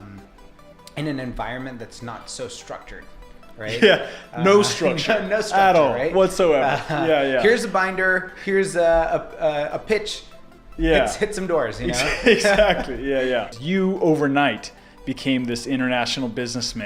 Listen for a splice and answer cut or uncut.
cut